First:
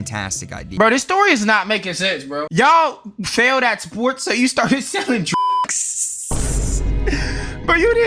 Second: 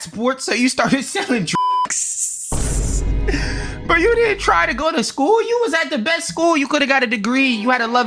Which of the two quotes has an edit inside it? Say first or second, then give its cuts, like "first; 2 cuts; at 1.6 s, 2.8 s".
first; 2 cuts; at 0.7 s, 2.5 s